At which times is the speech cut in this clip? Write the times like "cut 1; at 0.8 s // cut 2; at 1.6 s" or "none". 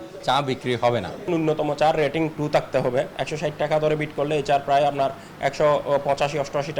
cut 1; at 1.1 s // cut 2; at 3.2 s